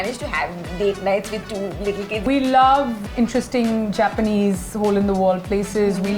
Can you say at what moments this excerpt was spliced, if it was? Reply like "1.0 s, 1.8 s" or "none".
2.2 s, 3.0 s